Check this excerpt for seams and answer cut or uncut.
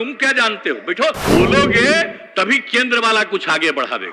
cut